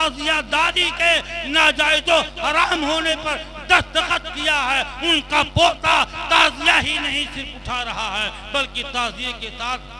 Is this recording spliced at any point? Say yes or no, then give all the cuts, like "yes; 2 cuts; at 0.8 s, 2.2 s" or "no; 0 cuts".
no; 0 cuts